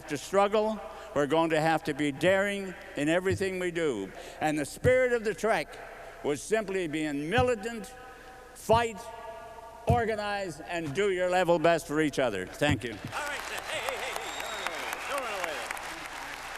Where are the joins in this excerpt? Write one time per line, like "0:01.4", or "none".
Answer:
0:04.2
0:13.1